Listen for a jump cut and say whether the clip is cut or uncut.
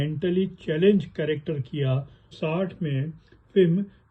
cut